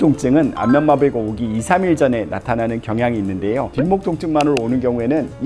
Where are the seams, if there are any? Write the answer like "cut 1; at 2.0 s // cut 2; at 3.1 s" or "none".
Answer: cut 1; at 3.7 s